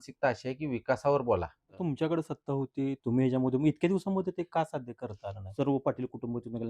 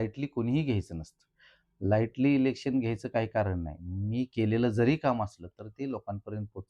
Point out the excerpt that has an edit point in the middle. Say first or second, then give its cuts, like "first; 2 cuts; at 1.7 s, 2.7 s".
first; 2 cuts; at 1.7 s, 5.4 s